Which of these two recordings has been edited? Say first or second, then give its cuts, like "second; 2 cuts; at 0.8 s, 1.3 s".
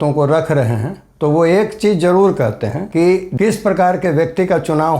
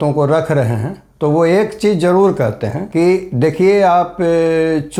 first; 1 cut; at 3.3 s